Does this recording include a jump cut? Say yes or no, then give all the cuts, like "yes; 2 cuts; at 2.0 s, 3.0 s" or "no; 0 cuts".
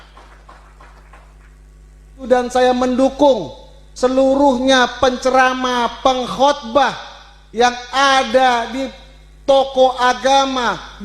yes; 1 cut; at 2.3 s